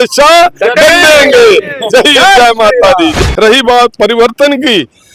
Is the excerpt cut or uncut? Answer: cut